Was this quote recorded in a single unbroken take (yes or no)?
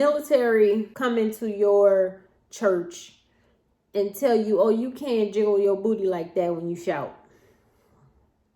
no